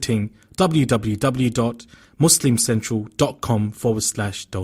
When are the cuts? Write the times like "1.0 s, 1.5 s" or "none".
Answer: none